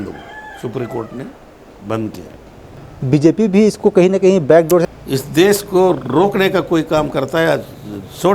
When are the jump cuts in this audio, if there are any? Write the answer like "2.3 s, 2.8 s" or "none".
2.8 s, 4.9 s